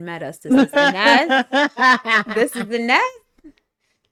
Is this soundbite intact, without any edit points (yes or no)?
yes